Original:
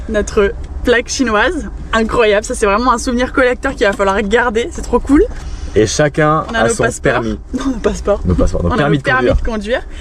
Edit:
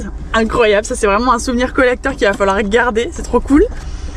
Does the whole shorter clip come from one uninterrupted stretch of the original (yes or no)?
yes